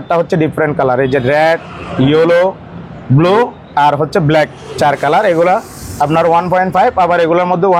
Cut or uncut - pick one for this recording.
uncut